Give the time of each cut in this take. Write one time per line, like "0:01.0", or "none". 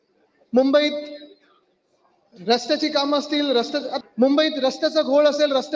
0:03.9